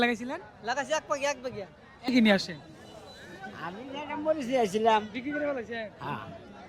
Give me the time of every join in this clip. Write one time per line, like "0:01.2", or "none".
0:02.1